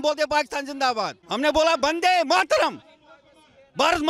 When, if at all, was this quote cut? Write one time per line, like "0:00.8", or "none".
0:01.2